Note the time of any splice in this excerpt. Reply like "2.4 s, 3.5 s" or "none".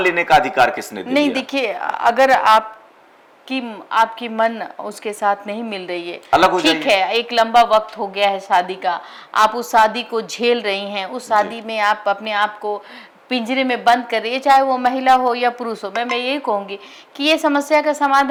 none